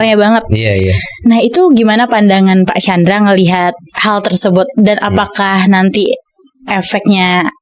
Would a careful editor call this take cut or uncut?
uncut